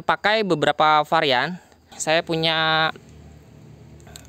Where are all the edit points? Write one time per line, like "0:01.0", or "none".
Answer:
0:01.9